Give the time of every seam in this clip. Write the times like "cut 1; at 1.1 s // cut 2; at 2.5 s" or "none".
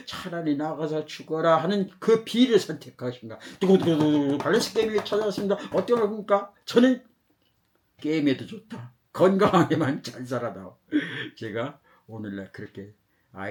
none